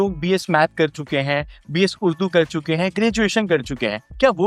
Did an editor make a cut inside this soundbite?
no; 0 cuts

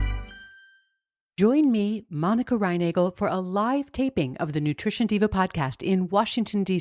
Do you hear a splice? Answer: yes; 1 cut; at 1.2 s

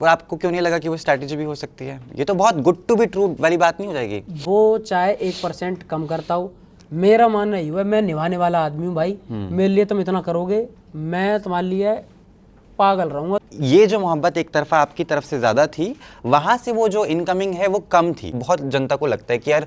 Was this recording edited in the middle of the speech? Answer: yes; 3 cuts; at 4.4 s, 13.4 s, 18.4 s

